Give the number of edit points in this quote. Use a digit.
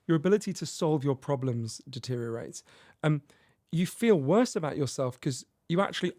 0